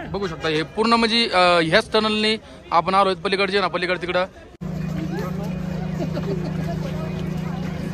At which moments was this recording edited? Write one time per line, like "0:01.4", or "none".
0:04.5